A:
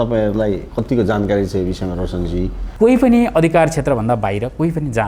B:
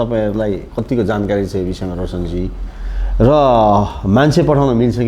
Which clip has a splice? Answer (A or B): A